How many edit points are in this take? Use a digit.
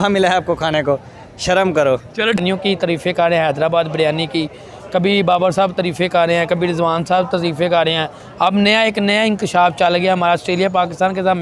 0